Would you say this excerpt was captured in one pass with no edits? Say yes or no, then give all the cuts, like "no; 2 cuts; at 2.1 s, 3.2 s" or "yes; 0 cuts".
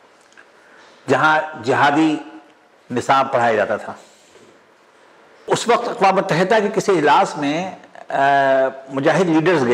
no; 1 cut; at 5.5 s